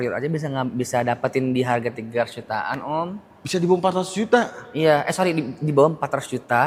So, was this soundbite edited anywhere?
no; 0 cuts

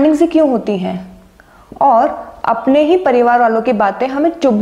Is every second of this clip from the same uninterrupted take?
yes; 0 cuts

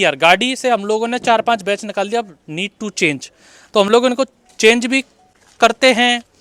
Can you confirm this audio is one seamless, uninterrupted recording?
yes; 0 cuts

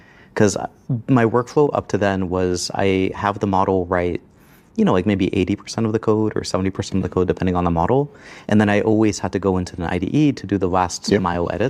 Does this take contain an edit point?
no; 0 cuts

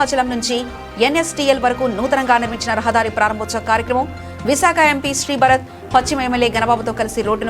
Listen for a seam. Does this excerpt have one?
no; 0 cuts

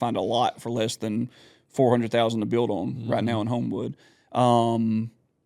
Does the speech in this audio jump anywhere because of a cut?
no; 0 cuts

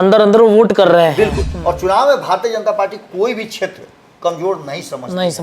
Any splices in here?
yes; 1 cut; at 1.5 s

